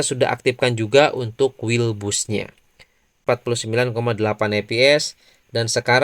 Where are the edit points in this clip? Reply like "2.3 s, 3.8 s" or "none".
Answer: 3.2 s